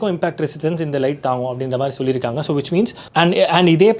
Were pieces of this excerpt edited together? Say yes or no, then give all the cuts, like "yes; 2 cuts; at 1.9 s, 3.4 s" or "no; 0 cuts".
yes; 1 cut; at 3.0 s